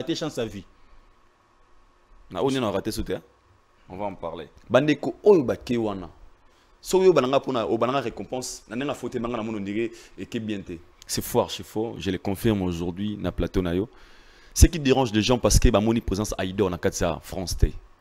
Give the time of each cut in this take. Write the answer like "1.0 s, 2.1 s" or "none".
4.5 s, 10.9 s